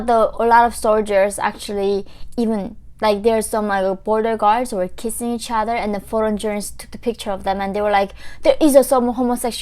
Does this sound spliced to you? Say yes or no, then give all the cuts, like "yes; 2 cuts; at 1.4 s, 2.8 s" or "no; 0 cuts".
no; 0 cuts